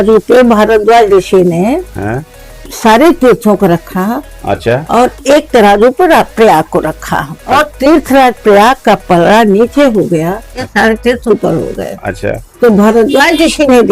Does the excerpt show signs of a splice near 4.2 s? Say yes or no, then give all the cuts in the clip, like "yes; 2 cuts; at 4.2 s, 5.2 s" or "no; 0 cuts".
no; 2 cuts; at 7.4 s, 10.7 s